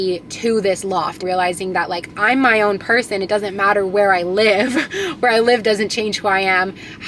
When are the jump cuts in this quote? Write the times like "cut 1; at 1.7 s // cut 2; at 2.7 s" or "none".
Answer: cut 1; at 1.2 s

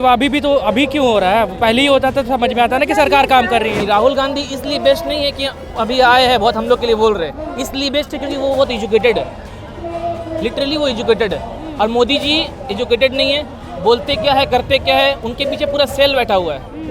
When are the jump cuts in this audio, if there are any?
cut 1; at 3.8 s

